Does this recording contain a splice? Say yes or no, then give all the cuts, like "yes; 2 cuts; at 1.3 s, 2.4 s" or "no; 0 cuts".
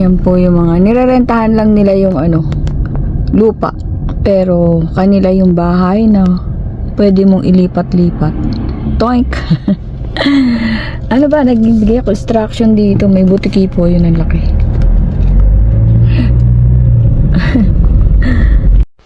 no; 0 cuts